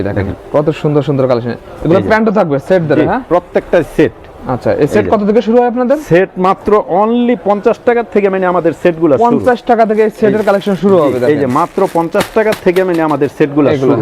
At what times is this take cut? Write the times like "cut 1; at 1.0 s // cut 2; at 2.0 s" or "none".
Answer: none